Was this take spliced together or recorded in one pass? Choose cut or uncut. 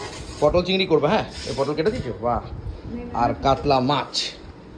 uncut